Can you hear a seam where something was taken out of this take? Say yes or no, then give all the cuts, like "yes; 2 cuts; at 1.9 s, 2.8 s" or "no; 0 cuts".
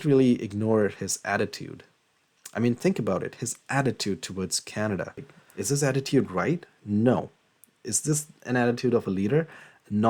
yes; 1 cut; at 5.4 s